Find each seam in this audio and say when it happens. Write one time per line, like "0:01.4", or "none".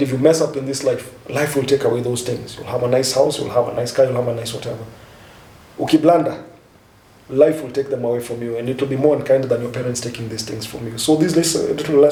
none